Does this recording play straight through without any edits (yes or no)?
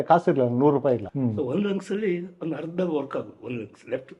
no